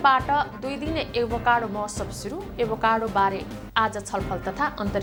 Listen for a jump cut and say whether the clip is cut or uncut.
uncut